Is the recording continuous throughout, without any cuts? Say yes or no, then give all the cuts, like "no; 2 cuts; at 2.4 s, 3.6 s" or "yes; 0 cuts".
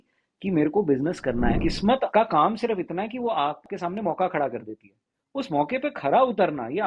no; 2 cuts; at 1.7 s, 3.7 s